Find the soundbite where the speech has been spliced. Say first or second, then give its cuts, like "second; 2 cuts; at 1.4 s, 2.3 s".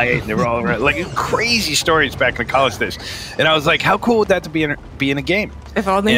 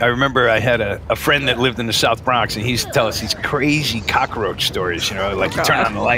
second; 1 cut; at 1.0 s